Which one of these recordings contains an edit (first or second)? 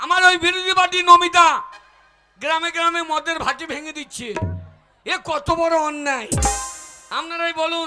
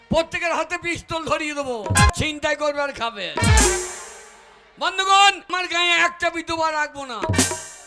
second